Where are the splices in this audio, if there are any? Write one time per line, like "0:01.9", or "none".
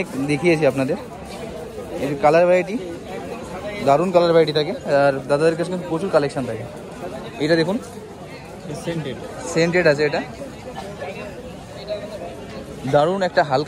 none